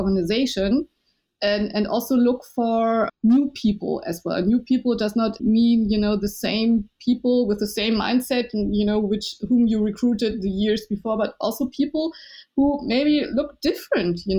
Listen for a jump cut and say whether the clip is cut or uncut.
cut